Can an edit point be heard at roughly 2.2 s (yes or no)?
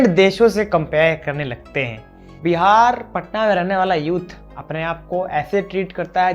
yes